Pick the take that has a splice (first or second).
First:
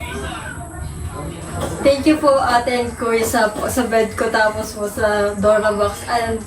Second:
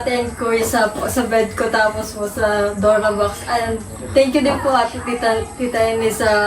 first